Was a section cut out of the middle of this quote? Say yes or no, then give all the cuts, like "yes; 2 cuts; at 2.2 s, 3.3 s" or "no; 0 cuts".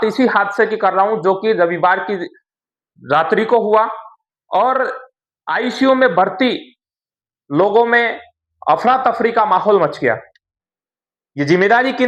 no; 0 cuts